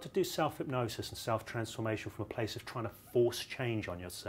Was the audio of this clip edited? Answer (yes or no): no